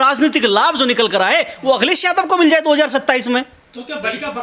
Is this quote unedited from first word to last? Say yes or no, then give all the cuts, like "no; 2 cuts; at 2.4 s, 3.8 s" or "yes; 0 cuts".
yes; 0 cuts